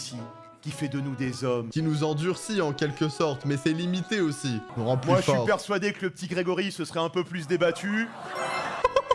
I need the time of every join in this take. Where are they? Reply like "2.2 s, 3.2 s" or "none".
none